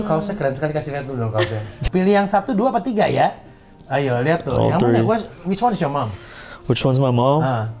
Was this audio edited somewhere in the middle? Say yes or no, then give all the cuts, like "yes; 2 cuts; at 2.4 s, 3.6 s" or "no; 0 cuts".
yes; 1 cut; at 1.8 s